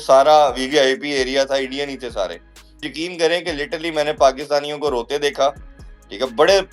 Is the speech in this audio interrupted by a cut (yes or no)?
yes